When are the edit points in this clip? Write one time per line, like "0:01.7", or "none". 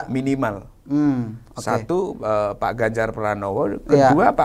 none